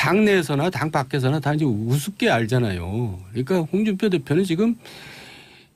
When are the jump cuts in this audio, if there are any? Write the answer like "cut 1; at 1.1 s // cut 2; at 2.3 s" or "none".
none